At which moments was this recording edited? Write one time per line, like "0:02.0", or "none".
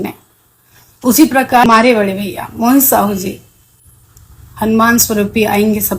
0:01.6